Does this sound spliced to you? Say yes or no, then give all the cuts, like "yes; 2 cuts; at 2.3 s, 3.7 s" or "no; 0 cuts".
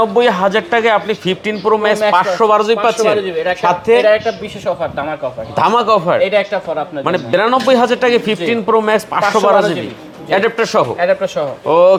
no; 0 cuts